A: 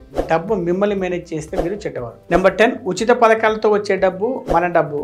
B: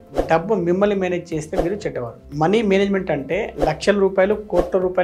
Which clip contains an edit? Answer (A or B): B